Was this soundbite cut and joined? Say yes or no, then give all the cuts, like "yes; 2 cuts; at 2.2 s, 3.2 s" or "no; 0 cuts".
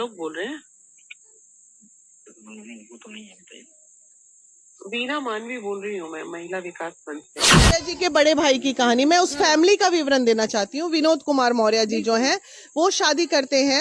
yes; 1 cut; at 7.6 s